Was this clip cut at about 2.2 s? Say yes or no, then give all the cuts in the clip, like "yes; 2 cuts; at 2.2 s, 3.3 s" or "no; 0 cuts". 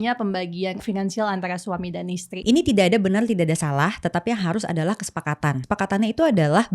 yes; 3 cuts; at 0.8 s, 2.2 s, 5.6 s